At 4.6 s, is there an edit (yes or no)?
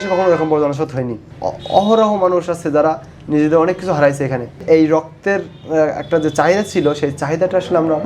yes